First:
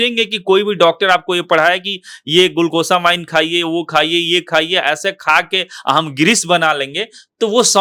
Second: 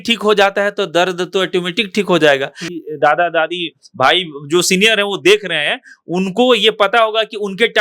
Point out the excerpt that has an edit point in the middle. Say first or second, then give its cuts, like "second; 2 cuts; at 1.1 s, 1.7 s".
second; 1 cut; at 2.7 s